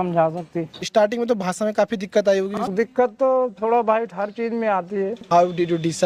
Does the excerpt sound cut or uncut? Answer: cut